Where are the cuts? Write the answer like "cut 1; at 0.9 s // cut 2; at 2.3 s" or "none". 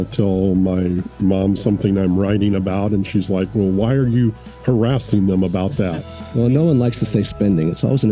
cut 1; at 6.0 s